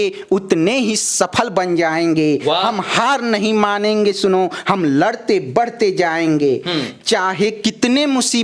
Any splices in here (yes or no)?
no